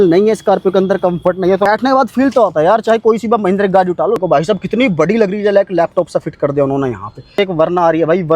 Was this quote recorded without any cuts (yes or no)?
no